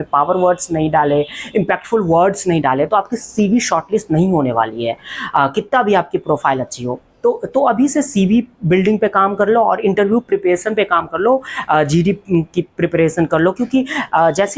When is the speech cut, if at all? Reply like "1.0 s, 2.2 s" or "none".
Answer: none